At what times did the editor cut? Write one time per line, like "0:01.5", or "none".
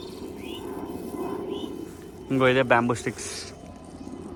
none